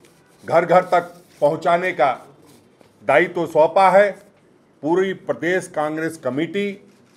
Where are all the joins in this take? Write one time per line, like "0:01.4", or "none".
none